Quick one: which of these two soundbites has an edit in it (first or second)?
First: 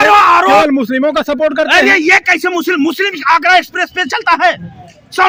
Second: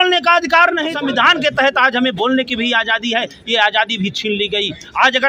second